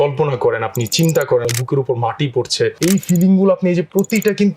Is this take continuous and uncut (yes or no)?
no